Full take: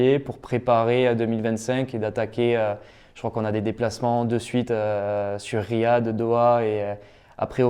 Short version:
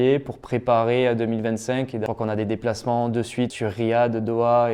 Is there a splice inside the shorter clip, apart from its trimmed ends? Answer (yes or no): yes